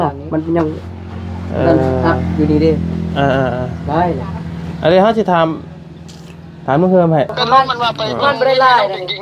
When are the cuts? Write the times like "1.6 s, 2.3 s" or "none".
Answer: 7.3 s